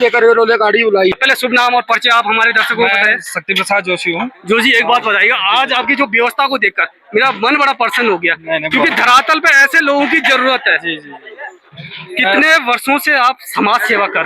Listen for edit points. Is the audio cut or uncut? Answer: cut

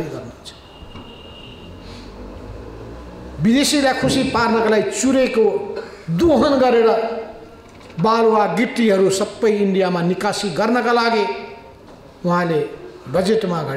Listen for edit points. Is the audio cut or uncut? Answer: uncut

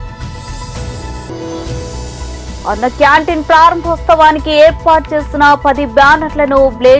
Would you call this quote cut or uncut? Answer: cut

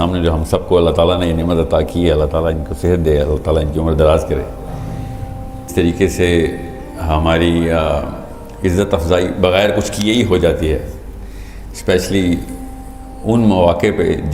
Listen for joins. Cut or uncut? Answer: cut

